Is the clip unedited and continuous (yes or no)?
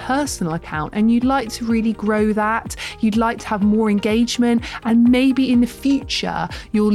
yes